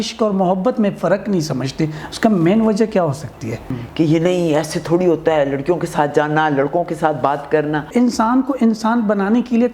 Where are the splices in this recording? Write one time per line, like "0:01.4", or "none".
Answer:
0:03.8
0:07.9